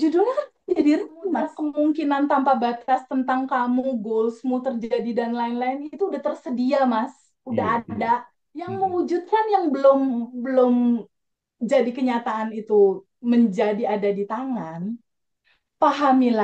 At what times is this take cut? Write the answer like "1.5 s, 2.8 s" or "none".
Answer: 1.6 s, 8.7 s